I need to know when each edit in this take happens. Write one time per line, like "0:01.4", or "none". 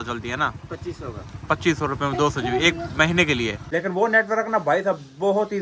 0:03.6

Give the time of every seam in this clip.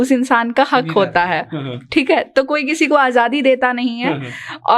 none

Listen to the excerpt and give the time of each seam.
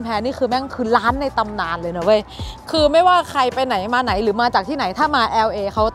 none

